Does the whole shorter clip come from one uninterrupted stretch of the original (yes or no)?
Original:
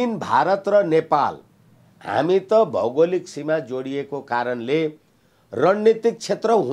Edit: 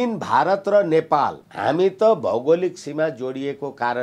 no